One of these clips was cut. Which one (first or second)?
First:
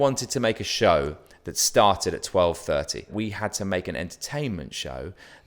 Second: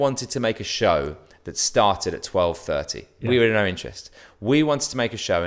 first